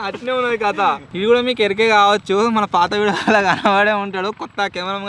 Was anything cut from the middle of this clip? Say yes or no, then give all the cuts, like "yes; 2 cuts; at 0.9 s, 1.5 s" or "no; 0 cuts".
yes; 1 cut; at 1.1 s